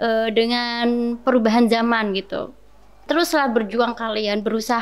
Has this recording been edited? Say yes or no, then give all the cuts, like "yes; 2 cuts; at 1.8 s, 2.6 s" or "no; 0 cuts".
yes; 1 cut; at 3.0 s